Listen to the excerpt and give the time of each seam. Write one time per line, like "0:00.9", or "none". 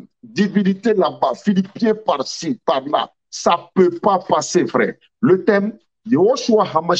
none